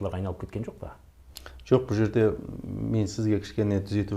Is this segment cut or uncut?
uncut